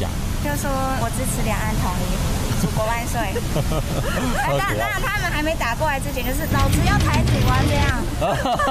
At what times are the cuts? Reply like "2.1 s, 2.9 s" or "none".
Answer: none